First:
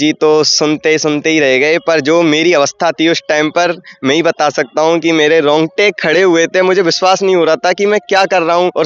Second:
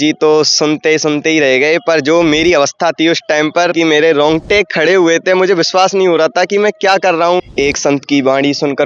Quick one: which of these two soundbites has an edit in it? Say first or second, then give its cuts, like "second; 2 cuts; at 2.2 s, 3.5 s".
second; 2 cuts; at 3.7 s, 7.4 s